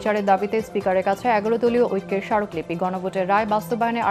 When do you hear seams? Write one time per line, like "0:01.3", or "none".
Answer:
none

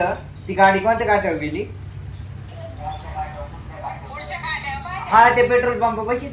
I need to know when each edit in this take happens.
none

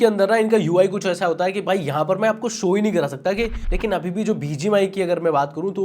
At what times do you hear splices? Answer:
0:03.6

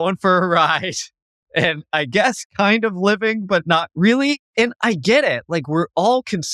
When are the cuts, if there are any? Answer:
0:04.4

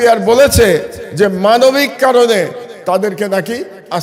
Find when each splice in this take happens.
none

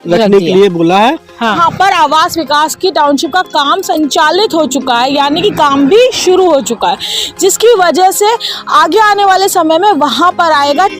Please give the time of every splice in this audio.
0:01.6

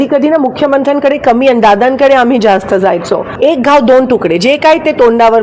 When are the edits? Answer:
0:03.3

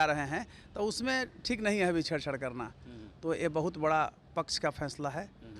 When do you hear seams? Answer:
none

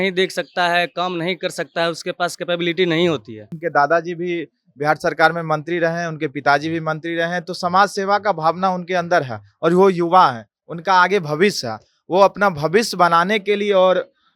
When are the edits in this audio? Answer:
0:03.5

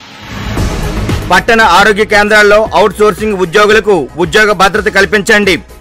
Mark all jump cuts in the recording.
0:01.2

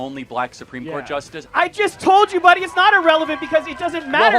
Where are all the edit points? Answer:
0:01.4

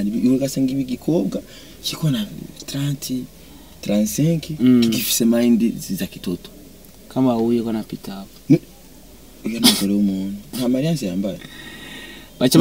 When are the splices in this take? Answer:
none

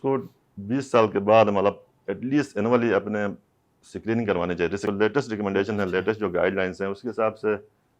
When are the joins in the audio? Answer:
0:04.8

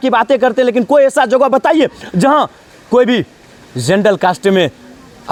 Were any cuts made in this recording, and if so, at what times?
none

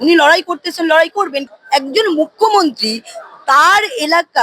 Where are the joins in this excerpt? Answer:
0:01.5

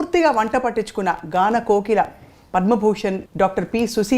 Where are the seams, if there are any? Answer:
0:03.2

